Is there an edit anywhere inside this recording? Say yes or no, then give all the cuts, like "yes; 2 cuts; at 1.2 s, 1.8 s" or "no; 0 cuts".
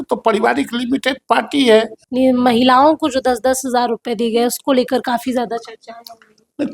yes; 1 cut; at 2.0 s